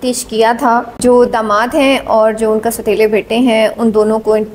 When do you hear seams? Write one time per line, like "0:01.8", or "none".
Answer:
0:00.9

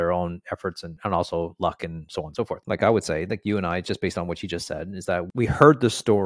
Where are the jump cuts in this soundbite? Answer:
0:00.9
0:02.6
0:05.3

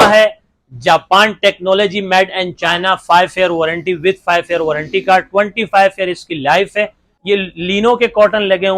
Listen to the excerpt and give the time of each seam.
0:07.1

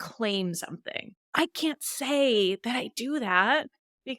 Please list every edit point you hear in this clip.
none

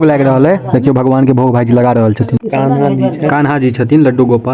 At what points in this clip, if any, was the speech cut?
0:02.4

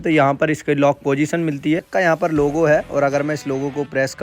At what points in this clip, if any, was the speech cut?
0:01.9

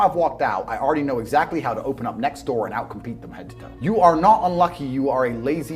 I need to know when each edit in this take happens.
0:03.7

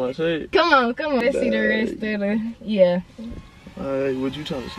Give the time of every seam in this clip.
0:01.2

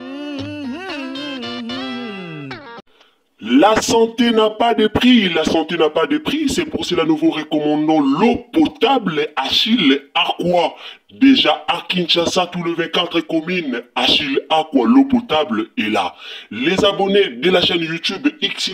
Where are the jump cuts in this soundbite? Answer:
0:02.8

